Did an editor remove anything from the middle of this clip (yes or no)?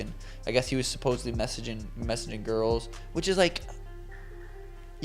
yes